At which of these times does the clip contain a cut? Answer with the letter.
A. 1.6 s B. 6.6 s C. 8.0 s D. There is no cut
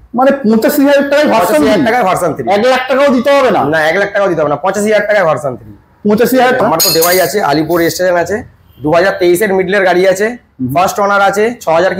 B